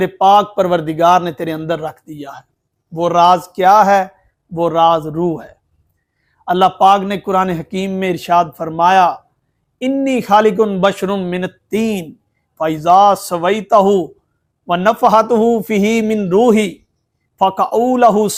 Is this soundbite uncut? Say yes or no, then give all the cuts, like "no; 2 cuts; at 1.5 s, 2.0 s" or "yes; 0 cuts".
yes; 0 cuts